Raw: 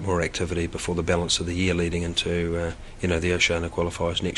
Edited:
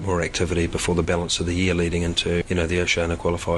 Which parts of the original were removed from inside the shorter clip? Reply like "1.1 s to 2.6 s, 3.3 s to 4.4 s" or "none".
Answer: 2.4 s to 3.0 s